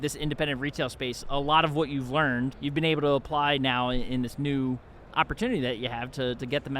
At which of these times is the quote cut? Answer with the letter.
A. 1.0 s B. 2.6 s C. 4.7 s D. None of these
B